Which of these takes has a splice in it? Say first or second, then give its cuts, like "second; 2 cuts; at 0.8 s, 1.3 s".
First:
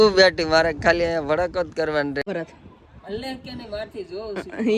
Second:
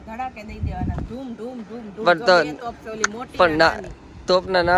first; 1 cut; at 2.2 s